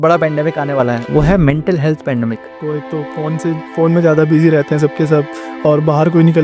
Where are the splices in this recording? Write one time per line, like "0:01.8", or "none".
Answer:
0:02.5